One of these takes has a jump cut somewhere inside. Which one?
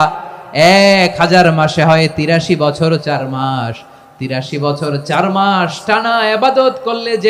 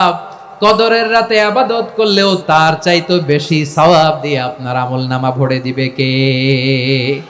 second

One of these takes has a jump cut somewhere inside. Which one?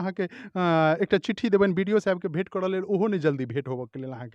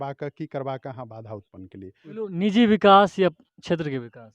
second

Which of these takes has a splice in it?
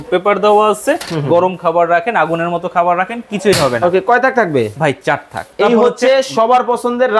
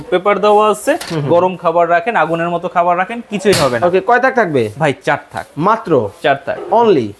first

